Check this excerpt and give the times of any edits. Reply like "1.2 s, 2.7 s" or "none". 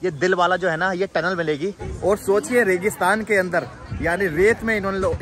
1.8 s

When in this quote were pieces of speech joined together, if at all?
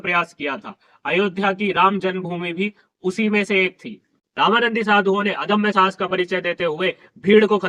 4.1 s

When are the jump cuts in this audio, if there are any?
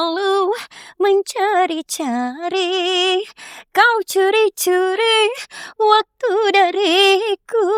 none

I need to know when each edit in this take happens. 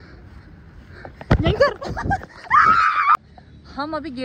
3.3 s

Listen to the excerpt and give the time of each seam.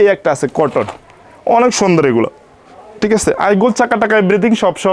none

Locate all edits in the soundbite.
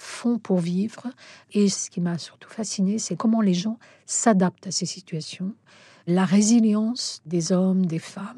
1.8 s

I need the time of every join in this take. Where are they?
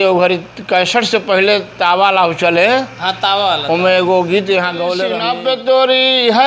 5.2 s

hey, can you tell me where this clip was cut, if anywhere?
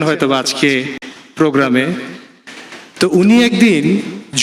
none

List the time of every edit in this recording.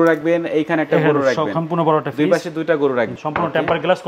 3.1 s

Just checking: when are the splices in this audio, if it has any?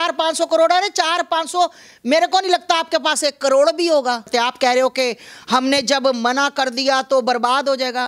4.3 s

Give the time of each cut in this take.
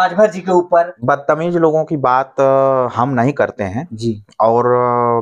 0.9 s

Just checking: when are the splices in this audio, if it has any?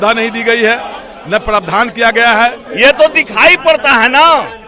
2.6 s

